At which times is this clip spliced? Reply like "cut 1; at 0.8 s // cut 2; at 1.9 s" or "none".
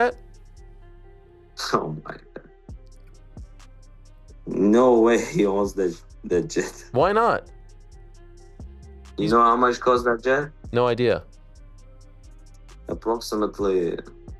cut 1; at 2.7 s // cut 2; at 4.1 s // cut 3; at 7.5 s // cut 4; at 9.1 s

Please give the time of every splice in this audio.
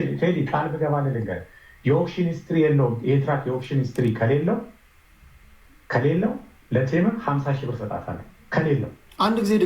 none

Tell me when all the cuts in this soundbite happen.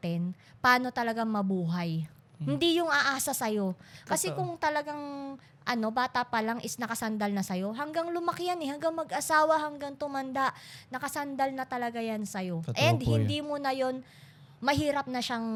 none

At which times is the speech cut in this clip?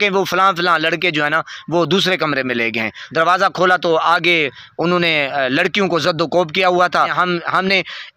cut 1; at 3.0 s // cut 2; at 7.1 s

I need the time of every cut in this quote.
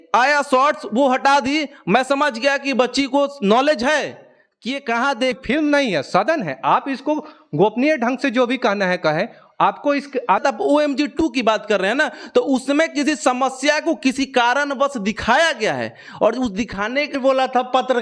cut 1; at 5.4 s // cut 2; at 10.4 s // cut 3; at 17.1 s

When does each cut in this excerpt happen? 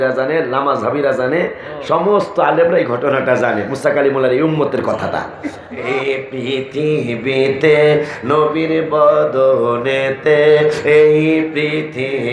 cut 1; at 5.8 s

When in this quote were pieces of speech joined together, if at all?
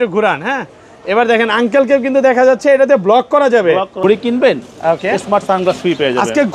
cut 1; at 4.0 s

